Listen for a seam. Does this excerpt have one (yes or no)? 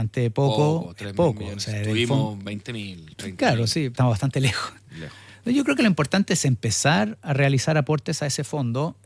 yes